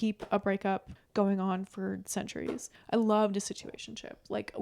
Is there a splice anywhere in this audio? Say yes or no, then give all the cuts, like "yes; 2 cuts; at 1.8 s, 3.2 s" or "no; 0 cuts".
yes; 2 cuts; at 1.0 s, 2.7 s